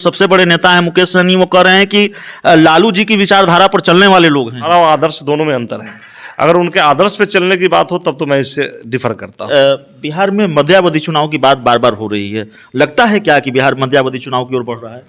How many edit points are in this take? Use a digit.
2